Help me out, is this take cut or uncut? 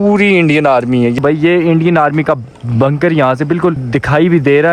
cut